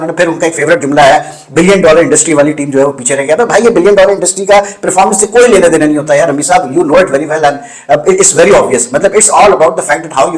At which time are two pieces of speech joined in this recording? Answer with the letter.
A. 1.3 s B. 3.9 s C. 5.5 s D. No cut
D